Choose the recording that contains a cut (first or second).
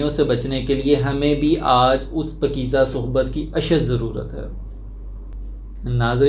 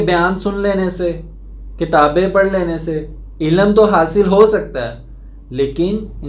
first